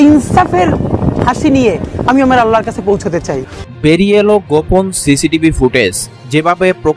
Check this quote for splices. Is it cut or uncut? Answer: cut